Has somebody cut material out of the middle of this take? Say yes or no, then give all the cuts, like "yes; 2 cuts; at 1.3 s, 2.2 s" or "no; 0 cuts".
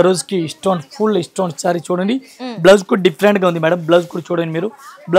no; 0 cuts